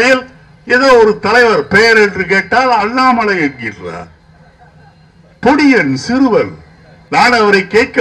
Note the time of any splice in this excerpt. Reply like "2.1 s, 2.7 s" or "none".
6.9 s